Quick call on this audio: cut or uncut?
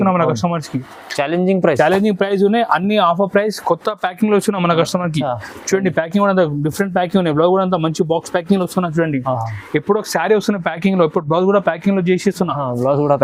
uncut